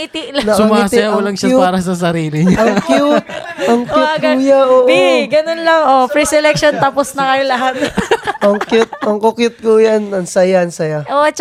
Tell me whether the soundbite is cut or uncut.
uncut